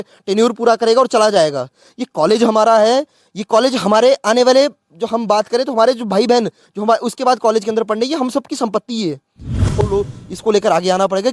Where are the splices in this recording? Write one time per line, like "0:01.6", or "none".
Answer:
0:09.7